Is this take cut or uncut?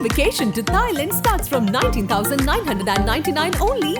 uncut